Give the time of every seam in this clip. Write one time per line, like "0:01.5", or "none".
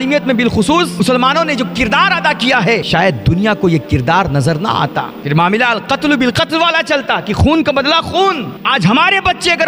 0:01.0
0:02.9
0:05.2
0:08.6